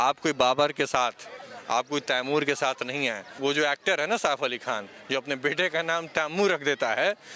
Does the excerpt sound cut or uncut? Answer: cut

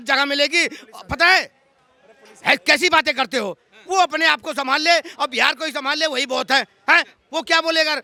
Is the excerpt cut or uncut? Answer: uncut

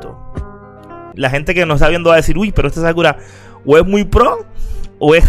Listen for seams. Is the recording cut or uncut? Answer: cut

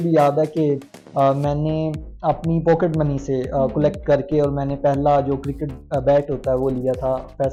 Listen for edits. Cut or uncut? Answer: uncut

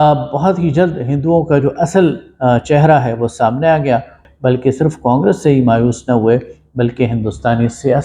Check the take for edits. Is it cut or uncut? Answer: cut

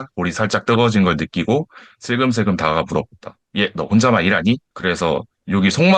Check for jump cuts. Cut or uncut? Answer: cut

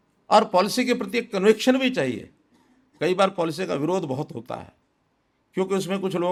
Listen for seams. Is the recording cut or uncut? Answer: uncut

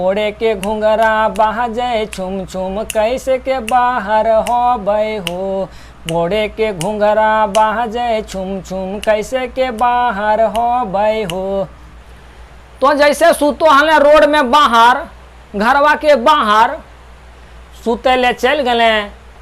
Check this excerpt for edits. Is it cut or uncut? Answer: cut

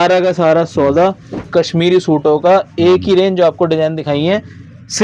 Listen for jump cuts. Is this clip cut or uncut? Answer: uncut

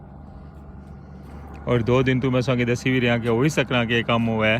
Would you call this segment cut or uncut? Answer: cut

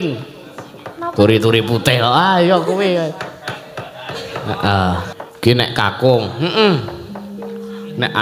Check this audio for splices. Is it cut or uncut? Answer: cut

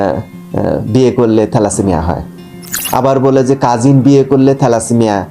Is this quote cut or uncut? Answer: cut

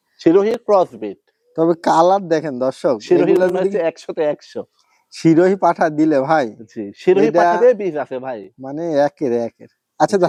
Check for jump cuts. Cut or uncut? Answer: uncut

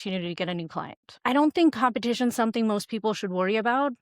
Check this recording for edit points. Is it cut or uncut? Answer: cut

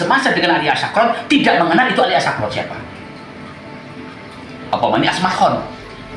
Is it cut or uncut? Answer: uncut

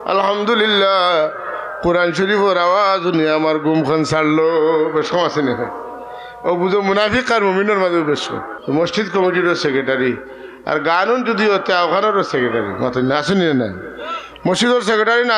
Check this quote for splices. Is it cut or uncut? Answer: cut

